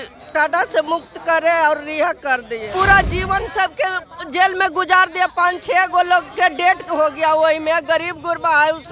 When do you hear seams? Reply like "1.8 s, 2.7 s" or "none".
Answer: 2.7 s